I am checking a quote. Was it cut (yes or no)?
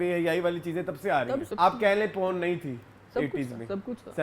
yes